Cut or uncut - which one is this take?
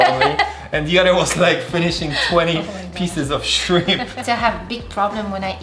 cut